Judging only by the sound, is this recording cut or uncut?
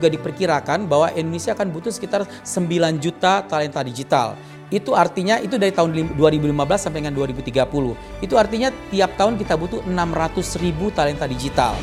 uncut